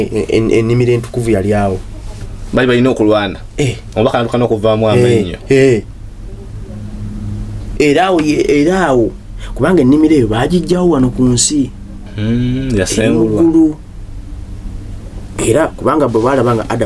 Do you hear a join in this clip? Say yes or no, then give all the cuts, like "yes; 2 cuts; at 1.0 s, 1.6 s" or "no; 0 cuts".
no; 0 cuts